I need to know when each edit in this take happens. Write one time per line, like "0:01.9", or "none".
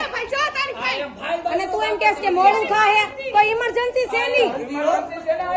none